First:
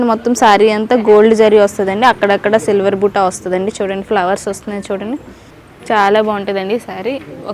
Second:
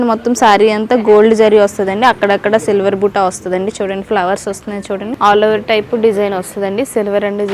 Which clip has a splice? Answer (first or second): second